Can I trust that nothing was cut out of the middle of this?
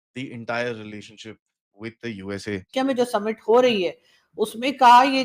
no; 1 cut; at 2.7 s

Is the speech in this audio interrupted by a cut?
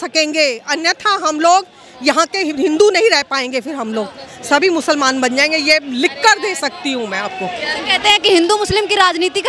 no; 0 cuts

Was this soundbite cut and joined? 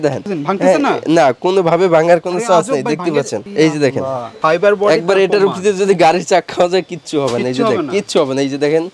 no; 0 cuts

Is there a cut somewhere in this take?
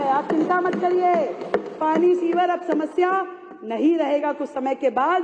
no; 0 cuts

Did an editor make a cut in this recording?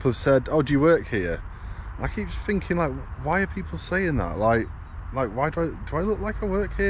no; 0 cuts

